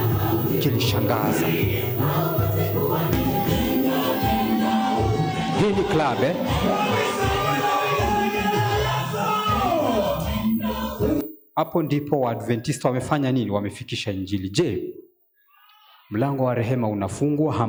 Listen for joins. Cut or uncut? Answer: uncut